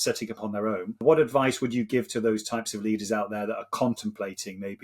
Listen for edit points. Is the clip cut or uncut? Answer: cut